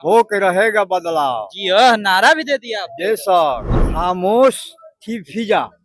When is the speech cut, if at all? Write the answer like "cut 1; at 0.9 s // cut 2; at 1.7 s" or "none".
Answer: cut 1; at 3.8 s

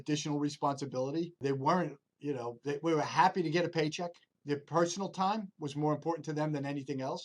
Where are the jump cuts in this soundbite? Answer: cut 1; at 1.4 s // cut 2; at 4.3 s

